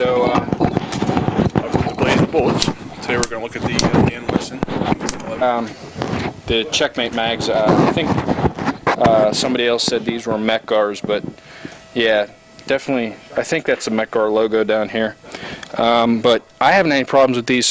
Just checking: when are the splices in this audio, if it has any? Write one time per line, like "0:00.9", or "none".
none